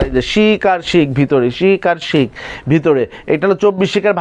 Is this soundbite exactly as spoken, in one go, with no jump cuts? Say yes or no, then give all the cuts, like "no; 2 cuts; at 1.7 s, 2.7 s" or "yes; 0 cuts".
yes; 0 cuts